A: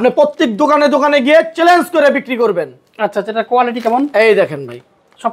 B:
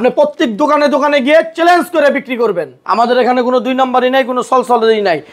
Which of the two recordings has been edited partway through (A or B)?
B